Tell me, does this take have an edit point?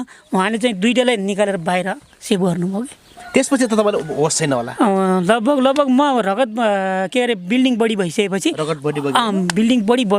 no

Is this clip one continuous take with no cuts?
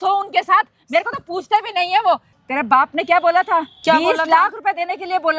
no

